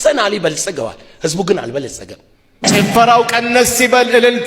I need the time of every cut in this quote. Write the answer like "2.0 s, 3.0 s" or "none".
2.6 s